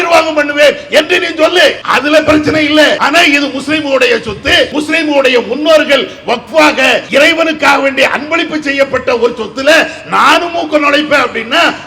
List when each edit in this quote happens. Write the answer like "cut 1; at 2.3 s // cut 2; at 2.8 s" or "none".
cut 1; at 1.8 s // cut 2; at 3.0 s // cut 3; at 4.7 s // cut 4; at 7.1 s